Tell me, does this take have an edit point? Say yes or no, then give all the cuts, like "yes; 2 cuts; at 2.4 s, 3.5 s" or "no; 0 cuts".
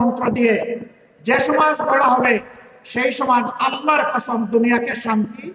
no; 0 cuts